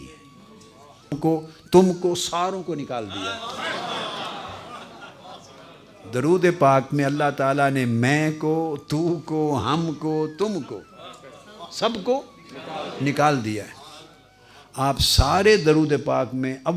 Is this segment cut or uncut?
cut